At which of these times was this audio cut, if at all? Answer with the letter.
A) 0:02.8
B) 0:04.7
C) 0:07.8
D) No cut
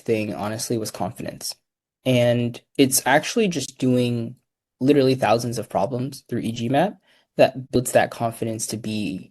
C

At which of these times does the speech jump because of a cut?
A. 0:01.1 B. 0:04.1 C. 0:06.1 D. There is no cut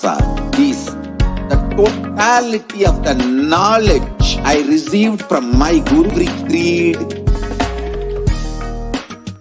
C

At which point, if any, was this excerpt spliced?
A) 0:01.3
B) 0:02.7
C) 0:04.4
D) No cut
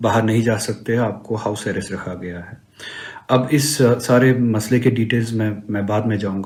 D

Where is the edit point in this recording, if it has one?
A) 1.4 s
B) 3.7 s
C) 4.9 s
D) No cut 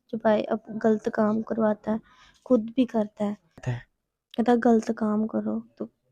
B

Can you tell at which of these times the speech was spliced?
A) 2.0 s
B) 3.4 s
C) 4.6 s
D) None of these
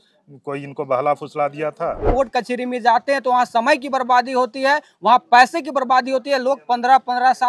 A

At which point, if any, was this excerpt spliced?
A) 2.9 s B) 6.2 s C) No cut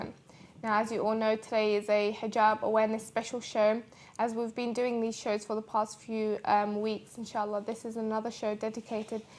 C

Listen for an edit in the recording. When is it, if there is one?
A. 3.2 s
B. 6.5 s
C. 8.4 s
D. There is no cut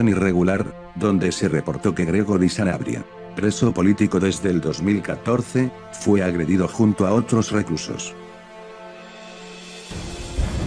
B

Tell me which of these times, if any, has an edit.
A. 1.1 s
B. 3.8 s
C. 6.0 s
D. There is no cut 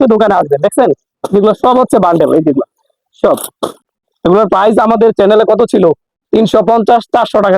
B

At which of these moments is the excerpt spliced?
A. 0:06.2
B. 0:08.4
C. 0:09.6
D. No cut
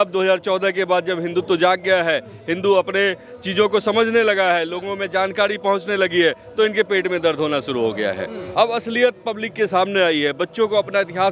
B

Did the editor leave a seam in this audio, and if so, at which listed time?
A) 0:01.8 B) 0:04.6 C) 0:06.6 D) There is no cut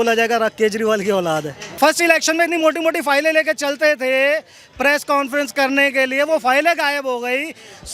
A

